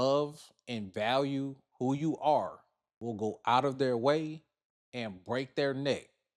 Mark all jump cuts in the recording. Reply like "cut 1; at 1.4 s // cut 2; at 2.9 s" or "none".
none